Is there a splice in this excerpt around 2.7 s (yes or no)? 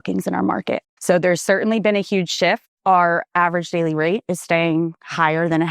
yes